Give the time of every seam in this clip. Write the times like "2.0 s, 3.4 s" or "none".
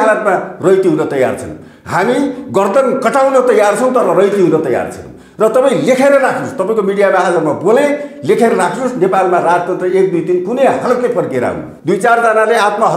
11.7 s